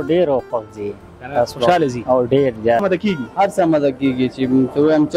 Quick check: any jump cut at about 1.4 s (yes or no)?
no